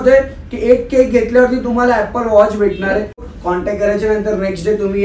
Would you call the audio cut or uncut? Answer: cut